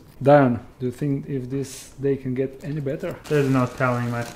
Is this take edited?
no; 0 cuts

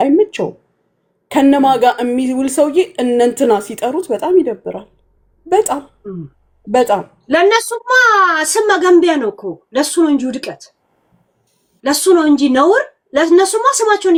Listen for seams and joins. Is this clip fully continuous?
yes; 0 cuts

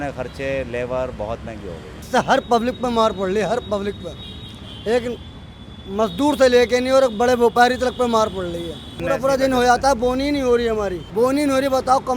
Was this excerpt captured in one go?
no; 3 cuts; at 2.1 s, 9.0 s, 11.0 s

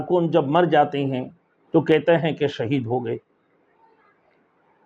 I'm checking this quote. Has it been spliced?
no; 0 cuts

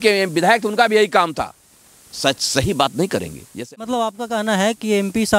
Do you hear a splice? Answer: yes; 1 cut; at 3.4 s

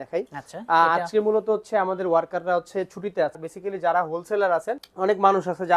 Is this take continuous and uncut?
no; 2 cuts; at 3.4 s, 4.8 s

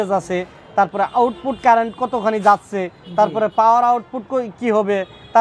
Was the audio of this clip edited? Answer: no; 0 cuts

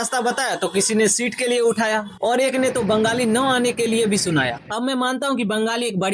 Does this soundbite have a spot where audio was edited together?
no; 0 cuts

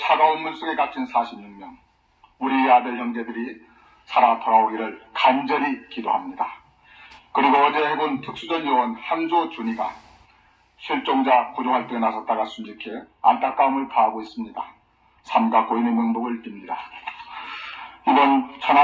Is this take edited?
no; 0 cuts

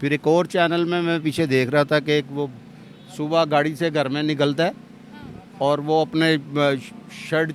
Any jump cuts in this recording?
no; 0 cuts

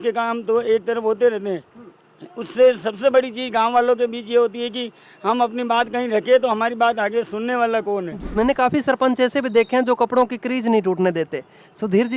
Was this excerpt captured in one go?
no; 1 cut; at 8.2 s

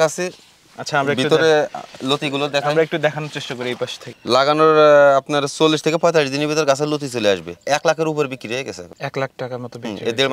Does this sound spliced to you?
yes; 3 cuts; at 4.1 s, 7.6 s, 8.9 s

